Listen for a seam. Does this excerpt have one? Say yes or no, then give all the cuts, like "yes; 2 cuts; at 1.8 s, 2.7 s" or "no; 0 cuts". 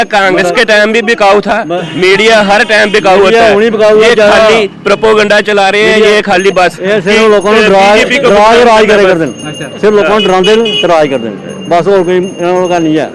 no; 0 cuts